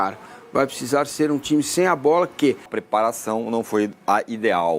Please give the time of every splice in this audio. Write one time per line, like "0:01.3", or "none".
0:02.8